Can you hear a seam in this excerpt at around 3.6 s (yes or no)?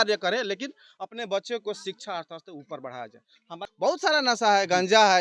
yes